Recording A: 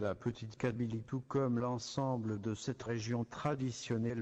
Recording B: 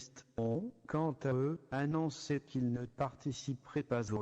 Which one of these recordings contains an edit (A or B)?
A